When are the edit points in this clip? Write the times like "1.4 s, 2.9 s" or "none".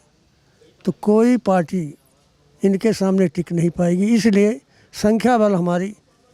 none